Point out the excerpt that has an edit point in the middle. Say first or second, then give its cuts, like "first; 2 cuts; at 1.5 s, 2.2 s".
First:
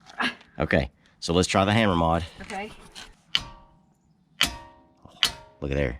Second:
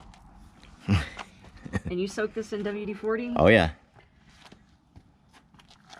first; 1 cut; at 3.2 s